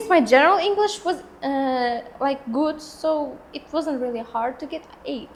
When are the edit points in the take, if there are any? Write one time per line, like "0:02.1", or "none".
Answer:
none